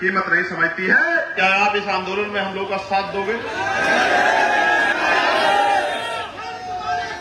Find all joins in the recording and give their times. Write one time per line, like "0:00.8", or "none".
0:01.3
0:04.9

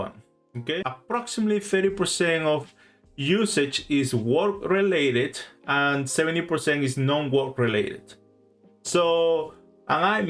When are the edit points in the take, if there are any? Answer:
0:00.9

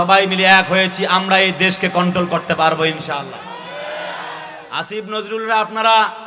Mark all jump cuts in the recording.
none

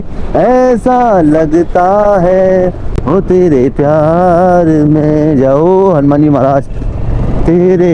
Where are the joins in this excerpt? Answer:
none

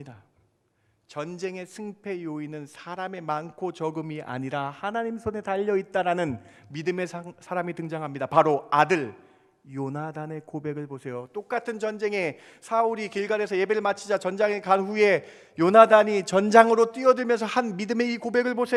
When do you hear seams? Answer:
none

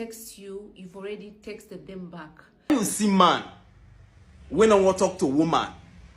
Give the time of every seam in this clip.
0:02.9

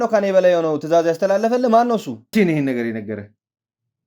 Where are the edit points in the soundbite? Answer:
0:02.3

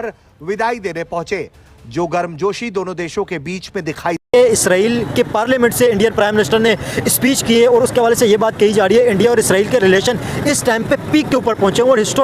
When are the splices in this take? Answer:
0:04.2

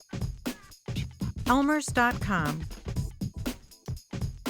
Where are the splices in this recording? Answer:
0:01.5
0:02.6

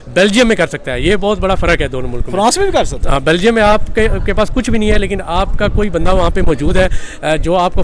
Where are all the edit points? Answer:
none

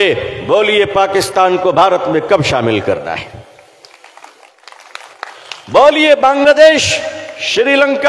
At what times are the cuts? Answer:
0:04.6

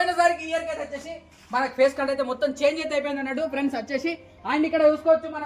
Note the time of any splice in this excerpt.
none

